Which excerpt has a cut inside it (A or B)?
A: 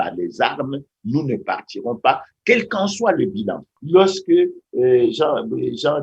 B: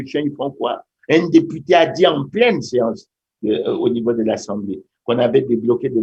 A